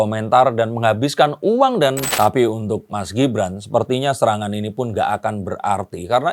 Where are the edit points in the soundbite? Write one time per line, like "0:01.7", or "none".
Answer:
0:02.1

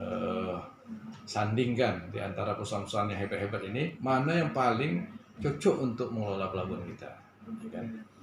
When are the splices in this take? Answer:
0:04.0

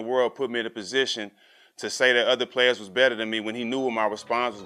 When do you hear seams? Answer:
none

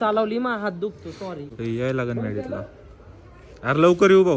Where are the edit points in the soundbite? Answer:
0:01.5

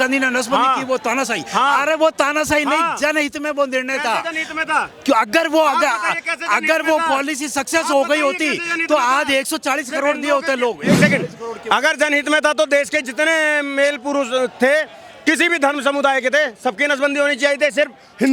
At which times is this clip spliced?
none

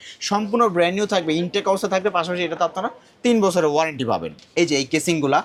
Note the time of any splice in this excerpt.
none

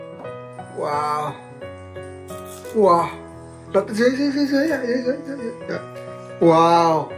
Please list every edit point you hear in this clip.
none

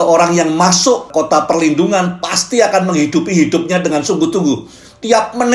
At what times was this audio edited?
0:01.1

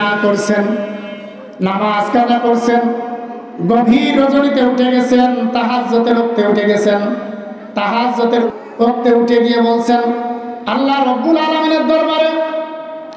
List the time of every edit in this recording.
0:08.5

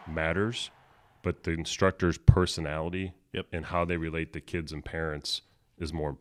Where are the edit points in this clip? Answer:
none

